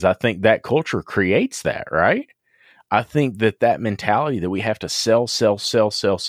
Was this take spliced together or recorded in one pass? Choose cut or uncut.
uncut